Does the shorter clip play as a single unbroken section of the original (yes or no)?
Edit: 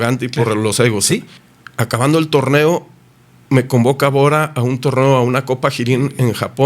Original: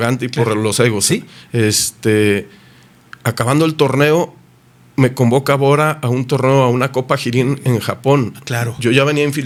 no